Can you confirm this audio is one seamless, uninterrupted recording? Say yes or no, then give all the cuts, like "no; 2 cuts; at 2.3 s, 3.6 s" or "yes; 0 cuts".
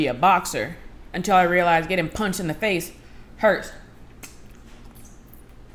yes; 0 cuts